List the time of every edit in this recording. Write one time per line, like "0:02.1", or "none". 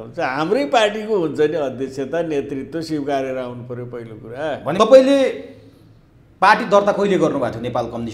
0:04.7